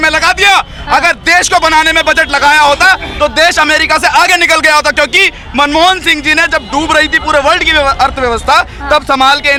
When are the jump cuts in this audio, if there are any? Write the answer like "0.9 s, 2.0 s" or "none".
none